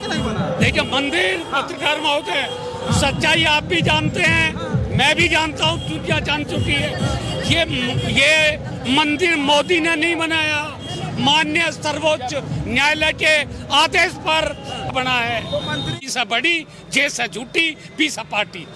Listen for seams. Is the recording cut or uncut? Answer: cut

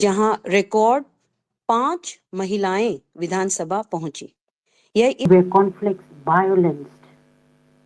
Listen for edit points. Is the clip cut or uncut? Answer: cut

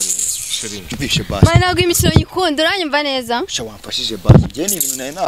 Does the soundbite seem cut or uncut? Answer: cut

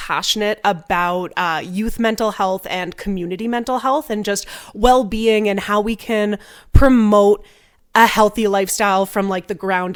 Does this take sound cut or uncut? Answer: uncut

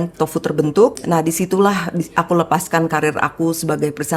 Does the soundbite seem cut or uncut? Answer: cut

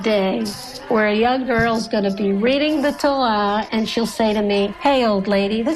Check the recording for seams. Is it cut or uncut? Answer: cut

